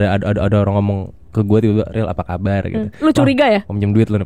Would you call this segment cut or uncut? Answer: uncut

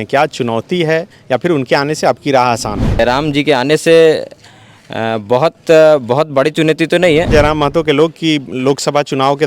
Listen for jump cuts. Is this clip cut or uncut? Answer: cut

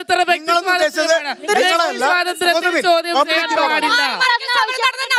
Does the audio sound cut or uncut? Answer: uncut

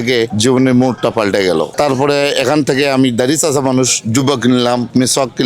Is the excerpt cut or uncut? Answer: cut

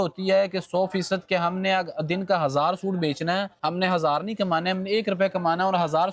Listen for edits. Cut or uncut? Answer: cut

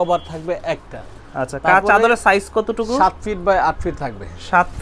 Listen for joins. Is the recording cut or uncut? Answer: uncut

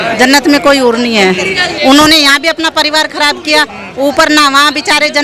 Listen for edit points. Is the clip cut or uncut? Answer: cut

